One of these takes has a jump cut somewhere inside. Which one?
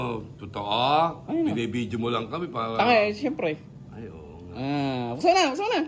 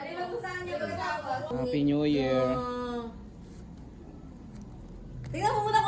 second; 1 cut; at 1.5 s

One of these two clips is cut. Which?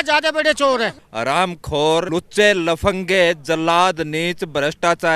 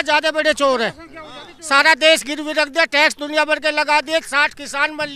first; 2 cuts; at 1.0 s, 2.1 s

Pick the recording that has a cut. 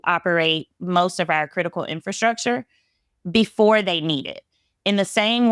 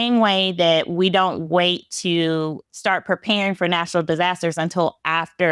second; 1 cut; at 2.6 s

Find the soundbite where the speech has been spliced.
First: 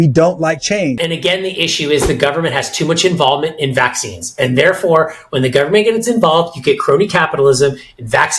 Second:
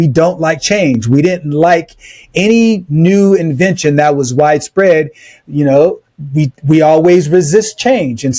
first; 1 cut; at 1.0 s

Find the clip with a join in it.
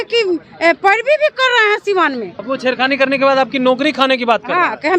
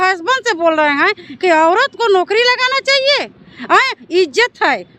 first; 1 cut; at 2.3 s

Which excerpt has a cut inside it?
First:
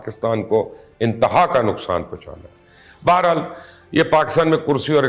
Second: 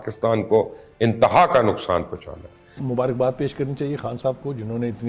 second; 1 cut; at 2.8 s

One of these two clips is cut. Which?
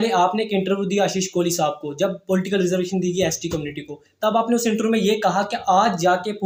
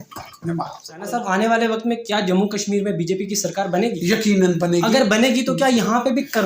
second; 1 cut; at 1.1 s

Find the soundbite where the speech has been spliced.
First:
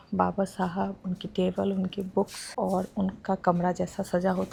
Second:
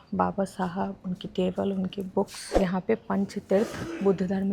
second; 1 cut; at 2.4 s

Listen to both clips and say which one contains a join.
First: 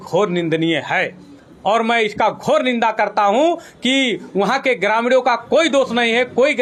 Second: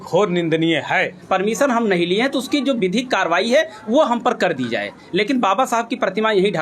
second; 1 cut; at 1.1 s

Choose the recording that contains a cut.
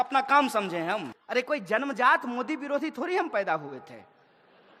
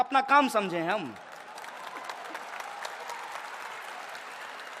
first; 1 cut; at 1.2 s

